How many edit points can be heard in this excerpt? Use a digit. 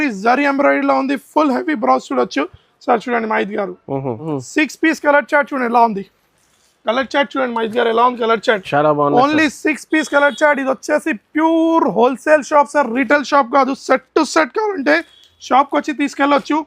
1